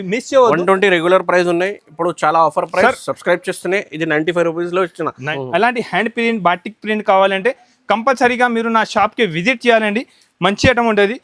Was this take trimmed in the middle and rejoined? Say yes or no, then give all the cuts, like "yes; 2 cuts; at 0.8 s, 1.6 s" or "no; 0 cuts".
yes; 1 cut; at 5.2 s